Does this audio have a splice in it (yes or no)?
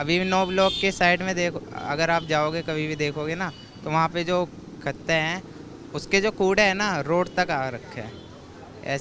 no